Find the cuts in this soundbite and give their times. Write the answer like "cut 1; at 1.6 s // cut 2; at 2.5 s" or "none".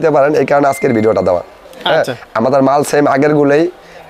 none